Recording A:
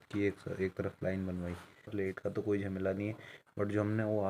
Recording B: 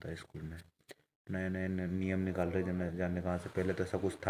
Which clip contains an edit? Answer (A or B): A